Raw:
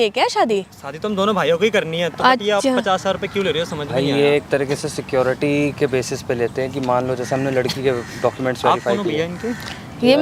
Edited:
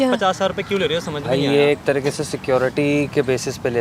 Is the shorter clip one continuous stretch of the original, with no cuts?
yes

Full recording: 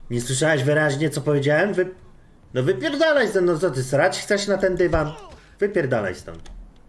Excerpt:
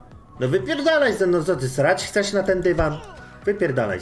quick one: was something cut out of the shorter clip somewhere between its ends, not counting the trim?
no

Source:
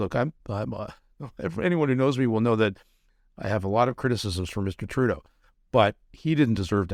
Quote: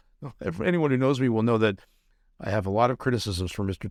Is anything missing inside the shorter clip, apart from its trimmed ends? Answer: no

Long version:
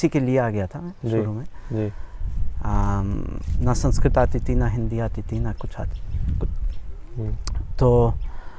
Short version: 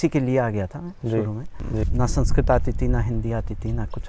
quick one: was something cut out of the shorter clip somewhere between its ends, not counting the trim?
yes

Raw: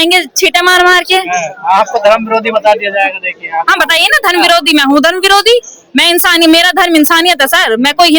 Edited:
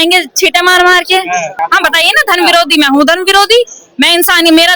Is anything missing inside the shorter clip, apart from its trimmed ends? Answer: yes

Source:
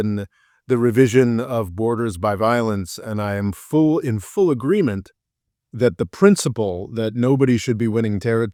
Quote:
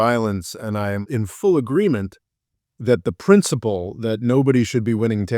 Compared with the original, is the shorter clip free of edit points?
no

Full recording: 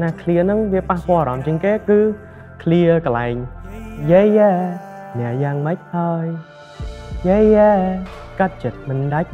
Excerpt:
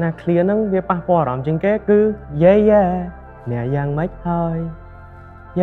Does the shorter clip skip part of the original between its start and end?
yes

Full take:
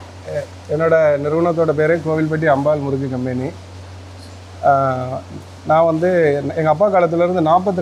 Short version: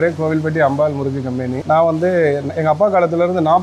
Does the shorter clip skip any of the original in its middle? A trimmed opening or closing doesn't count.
yes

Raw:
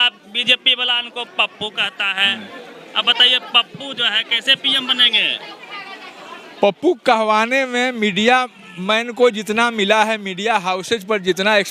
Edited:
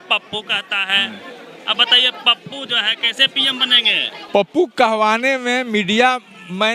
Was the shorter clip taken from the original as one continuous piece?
no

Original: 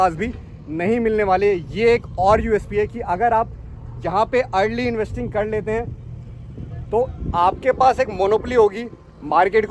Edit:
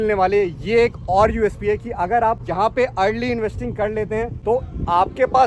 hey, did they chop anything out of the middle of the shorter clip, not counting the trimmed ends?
yes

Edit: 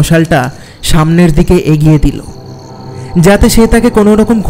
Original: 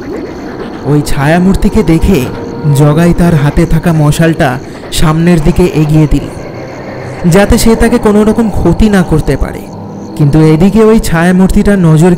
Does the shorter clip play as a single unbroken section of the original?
yes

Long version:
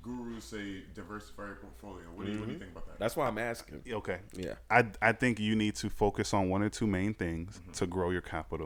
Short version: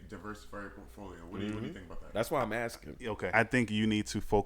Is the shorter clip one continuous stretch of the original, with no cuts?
no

